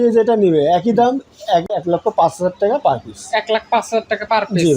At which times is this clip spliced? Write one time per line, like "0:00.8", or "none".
0:01.7